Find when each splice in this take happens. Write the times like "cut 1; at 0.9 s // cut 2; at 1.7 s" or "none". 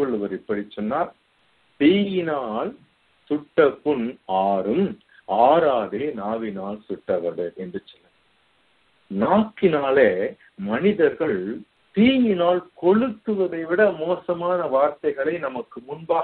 none